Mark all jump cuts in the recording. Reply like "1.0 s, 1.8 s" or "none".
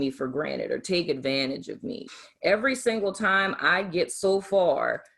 2.0 s